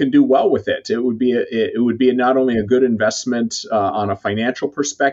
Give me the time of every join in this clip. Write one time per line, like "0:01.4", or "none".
none